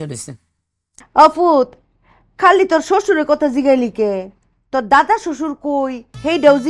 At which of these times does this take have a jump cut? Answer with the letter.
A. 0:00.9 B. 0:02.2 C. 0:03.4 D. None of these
A